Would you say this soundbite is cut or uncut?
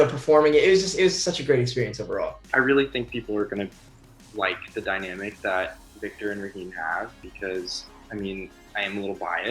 cut